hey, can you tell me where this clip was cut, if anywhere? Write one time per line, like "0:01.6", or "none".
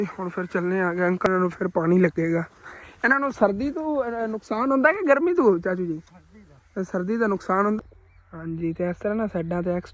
0:01.3
0:07.8